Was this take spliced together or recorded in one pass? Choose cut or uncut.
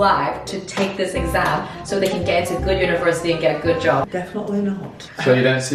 uncut